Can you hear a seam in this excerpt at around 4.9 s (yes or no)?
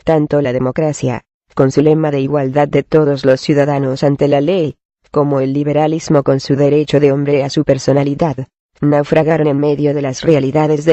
yes